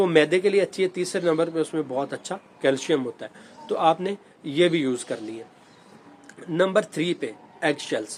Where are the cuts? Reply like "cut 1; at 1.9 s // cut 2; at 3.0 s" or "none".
none